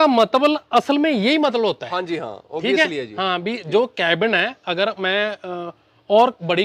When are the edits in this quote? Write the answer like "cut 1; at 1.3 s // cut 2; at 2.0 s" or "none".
none